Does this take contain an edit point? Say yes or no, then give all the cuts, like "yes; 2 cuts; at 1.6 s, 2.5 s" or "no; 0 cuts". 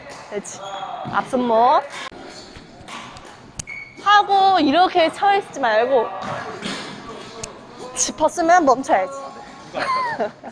yes; 1 cut; at 2.1 s